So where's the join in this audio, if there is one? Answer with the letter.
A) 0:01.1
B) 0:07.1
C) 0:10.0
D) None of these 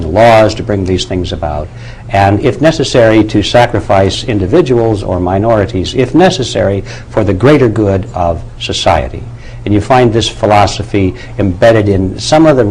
A